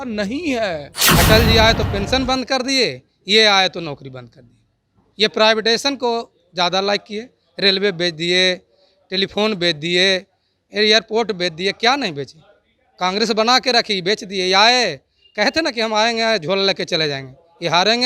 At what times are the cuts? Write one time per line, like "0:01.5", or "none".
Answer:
0:01.0